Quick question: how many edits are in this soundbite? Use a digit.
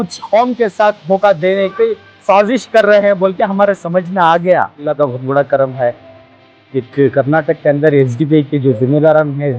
1